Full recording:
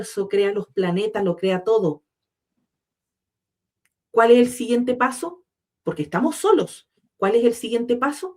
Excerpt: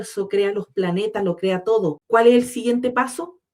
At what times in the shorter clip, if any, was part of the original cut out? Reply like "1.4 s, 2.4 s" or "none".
2.0 s